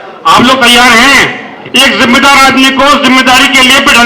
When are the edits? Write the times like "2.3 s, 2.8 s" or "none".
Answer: none